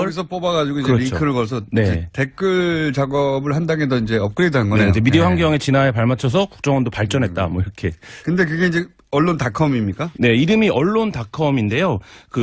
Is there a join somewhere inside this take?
no; 0 cuts

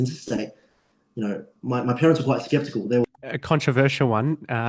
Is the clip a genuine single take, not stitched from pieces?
no; 1 cut; at 3.1 s

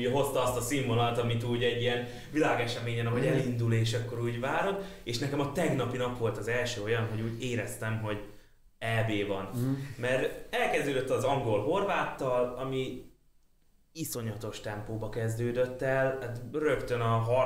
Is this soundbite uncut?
yes; 0 cuts

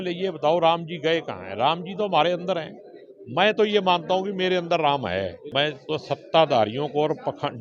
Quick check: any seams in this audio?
yes; 1 cut; at 5.4 s

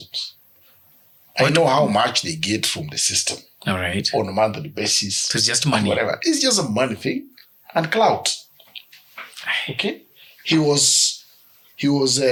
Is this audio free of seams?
yes; 0 cuts

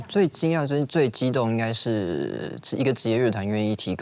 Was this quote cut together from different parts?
yes; 1 cut; at 0.9 s

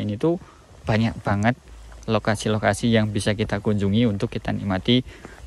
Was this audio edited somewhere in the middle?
no; 0 cuts

